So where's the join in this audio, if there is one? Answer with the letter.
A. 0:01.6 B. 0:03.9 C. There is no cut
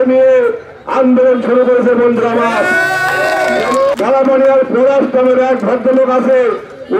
B